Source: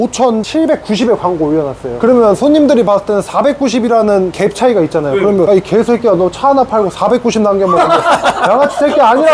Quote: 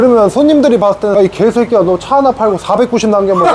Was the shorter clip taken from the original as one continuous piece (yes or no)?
no